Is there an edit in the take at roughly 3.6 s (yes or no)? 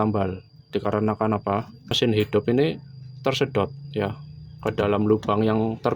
no